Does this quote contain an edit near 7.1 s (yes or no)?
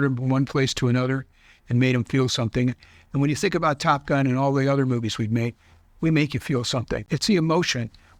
yes